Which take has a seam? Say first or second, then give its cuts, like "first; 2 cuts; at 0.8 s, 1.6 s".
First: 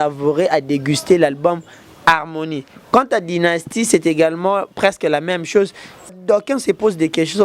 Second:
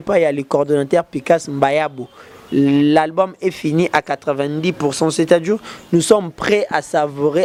first; 1 cut; at 6.1 s